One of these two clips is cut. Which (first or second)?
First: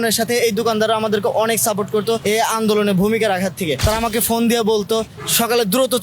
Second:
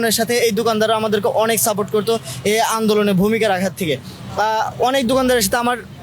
first